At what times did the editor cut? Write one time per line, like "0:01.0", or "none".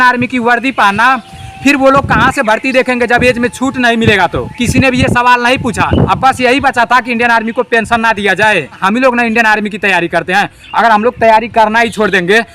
0:06.1
0:08.8